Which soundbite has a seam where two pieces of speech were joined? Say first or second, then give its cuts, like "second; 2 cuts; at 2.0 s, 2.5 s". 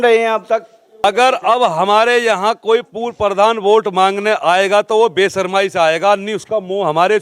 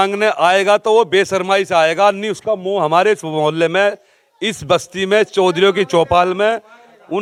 first; 1 cut; at 1.0 s